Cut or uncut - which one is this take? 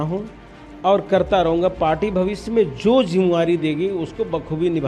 uncut